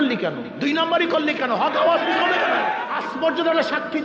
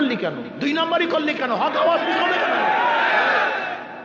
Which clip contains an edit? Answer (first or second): first